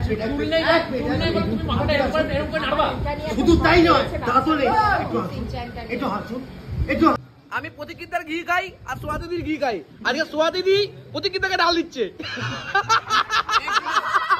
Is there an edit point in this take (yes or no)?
yes